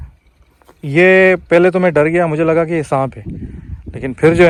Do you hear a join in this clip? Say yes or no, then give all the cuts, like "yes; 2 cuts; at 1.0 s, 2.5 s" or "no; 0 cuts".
no; 0 cuts